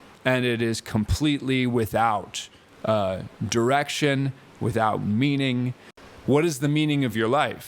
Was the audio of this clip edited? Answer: yes; 1 cut; at 5.8 s

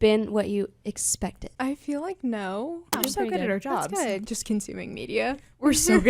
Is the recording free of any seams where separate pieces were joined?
no; 3 cuts; at 1.4 s, 2.9 s, 4.2 s

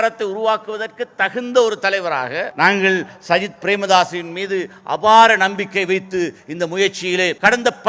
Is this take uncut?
yes; 0 cuts

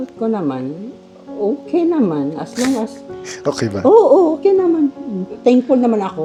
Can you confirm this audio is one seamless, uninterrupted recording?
yes; 0 cuts

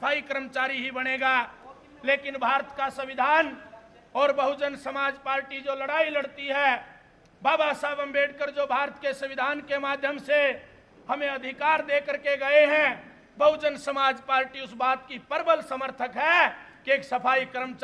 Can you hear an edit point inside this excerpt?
no; 0 cuts

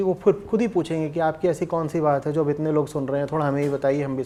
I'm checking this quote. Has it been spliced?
no; 0 cuts

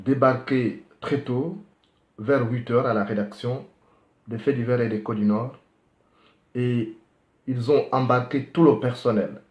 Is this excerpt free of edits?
no; 1 cut; at 8.3 s

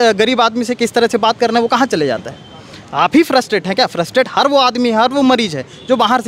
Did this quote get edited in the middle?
no; 0 cuts

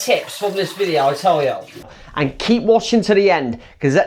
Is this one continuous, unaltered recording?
no; 1 cut; at 2.0 s

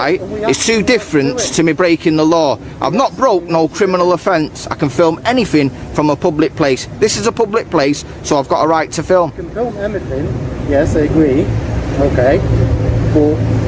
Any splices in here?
no; 0 cuts

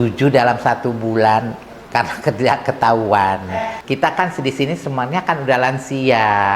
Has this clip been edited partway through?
yes; 1 cut; at 3.8 s

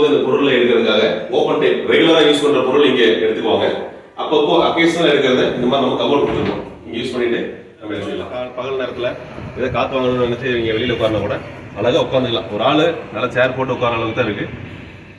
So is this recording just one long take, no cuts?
no; 1 cut; at 8.3 s

